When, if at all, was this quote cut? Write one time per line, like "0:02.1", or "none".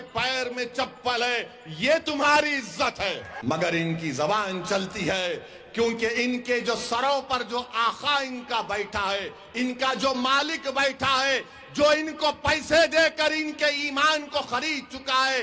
0:03.3